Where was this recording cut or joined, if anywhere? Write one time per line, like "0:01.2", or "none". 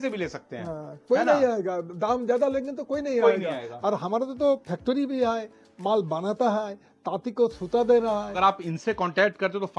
0:08.3

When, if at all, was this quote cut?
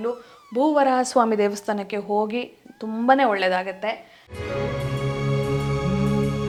none

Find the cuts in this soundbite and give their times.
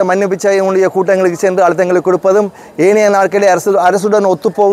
none

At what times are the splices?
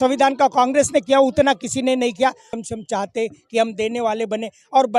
0:02.6

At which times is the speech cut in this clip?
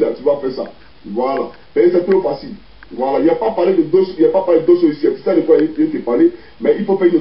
none

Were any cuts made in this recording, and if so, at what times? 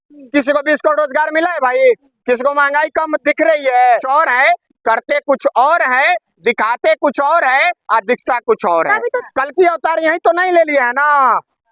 0:04.0
0:09.1

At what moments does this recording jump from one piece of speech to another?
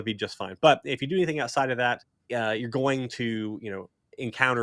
0:02.1

